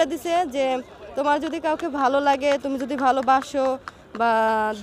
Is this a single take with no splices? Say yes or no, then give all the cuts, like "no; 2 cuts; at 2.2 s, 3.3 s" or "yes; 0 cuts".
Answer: yes; 0 cuts